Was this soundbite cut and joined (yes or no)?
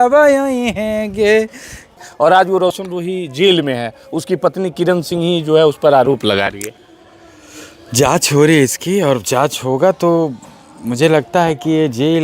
yes